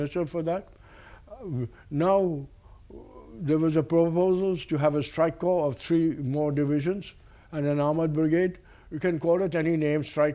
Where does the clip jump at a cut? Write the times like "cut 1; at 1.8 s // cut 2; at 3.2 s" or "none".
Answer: cut 1; at 1.4 s